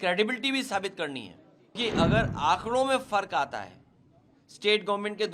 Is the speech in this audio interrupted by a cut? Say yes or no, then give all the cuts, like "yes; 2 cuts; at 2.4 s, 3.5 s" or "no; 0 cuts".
yes; 1 cut; at 1.8 s